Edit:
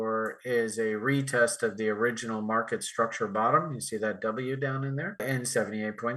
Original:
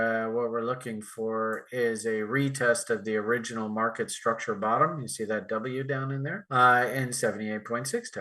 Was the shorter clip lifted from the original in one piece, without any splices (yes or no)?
no